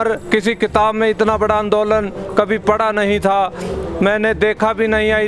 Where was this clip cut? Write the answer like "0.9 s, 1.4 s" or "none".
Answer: none